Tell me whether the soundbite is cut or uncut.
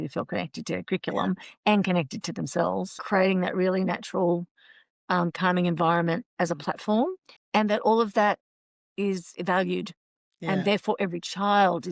cut